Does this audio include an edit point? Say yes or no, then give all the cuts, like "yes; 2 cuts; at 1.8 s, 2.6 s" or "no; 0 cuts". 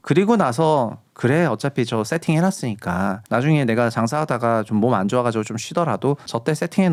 no; 0 cuts